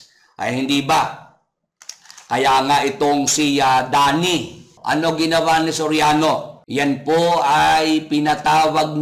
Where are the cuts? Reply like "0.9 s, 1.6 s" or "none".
4.7 s, 6.6 s

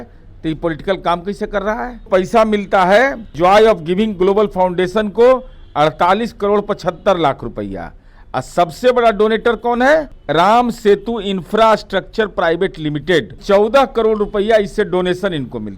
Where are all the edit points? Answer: 2.1 s, 3.3 s, 10.2 s, 13.4 s

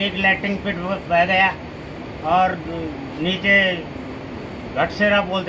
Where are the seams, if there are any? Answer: none

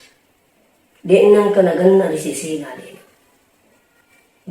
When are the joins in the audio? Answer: none

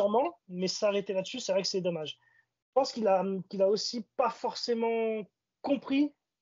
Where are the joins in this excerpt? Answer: none

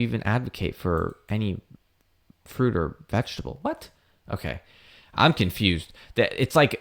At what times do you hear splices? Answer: none

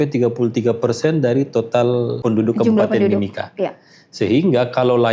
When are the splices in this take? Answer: 2.1 s

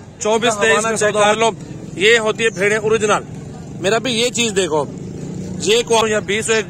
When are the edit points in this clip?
1.2 s, 6.0 s

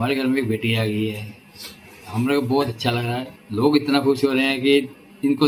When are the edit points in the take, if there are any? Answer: 3.4 s

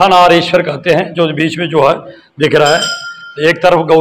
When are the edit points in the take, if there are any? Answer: none

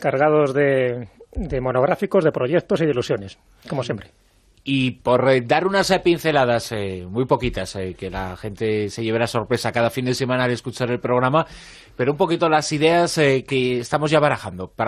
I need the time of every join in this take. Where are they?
6.8 s

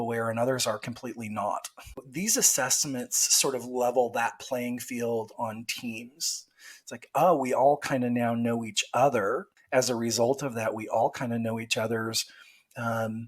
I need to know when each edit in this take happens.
2.1 s, 9.5 s

